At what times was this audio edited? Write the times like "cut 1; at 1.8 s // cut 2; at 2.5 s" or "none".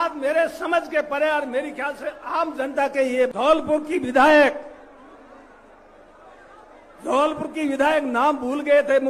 cut 1; at 3.3 s